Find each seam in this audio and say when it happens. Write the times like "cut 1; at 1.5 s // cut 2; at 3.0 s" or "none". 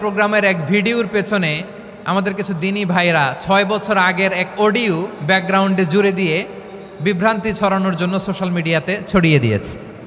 none